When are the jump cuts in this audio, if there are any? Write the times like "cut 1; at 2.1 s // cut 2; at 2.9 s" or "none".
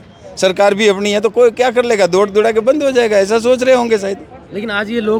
none